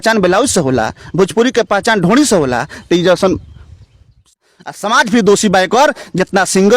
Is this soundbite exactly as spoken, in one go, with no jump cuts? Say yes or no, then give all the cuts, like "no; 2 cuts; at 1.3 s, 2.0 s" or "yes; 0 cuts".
no; 1 cut; at 4.3 s